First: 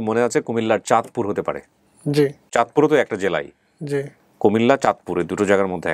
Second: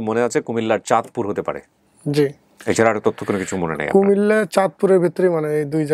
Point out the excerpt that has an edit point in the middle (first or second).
first